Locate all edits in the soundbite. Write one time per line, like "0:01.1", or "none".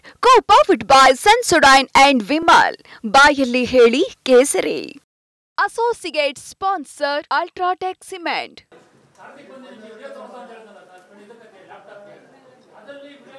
0:08.6